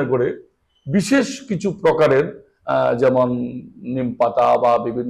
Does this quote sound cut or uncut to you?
uncut